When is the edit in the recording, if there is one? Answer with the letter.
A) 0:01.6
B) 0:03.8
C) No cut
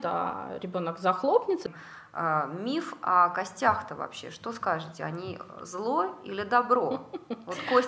A